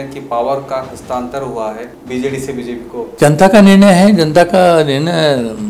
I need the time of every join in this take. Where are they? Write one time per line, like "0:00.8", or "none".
0:01.9
0:03.1